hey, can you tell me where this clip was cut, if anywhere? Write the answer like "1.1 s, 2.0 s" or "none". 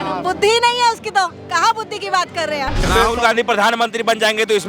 2.9 s